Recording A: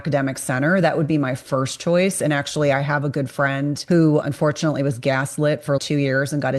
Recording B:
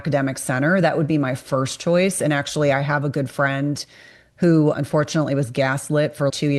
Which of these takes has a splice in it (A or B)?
A